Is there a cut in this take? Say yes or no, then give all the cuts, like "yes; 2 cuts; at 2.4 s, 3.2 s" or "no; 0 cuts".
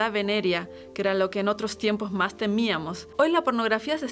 yes; 1 cut; at 3.0 s